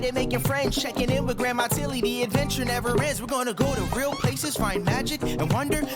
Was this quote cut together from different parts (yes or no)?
no